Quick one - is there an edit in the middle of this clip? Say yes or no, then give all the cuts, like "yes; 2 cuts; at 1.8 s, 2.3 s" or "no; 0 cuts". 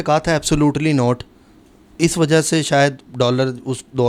no; 0 cuts